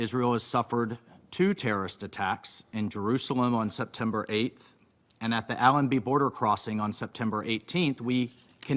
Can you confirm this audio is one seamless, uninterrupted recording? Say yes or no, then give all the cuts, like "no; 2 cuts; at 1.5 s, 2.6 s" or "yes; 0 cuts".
yes; 0 cuts